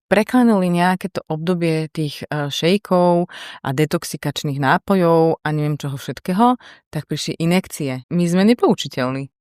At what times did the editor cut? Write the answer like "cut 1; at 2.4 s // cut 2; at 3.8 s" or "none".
cut 1; at 8.0 s